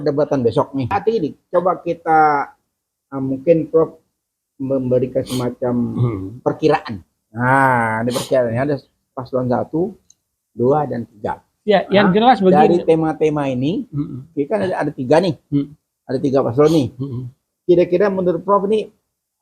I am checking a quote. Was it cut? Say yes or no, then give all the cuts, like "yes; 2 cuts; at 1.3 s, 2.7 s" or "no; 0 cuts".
yes; 1 cut; at 1.0 s